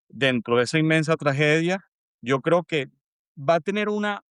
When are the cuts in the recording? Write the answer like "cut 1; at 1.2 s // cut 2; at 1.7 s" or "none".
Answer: none